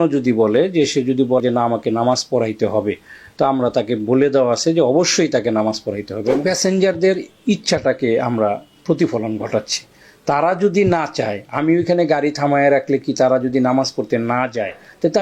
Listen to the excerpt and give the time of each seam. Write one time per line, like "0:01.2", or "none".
0:01.4
0:06.4